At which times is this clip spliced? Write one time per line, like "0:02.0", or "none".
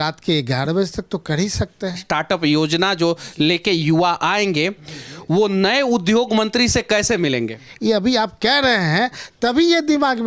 0:02.0
0:07.6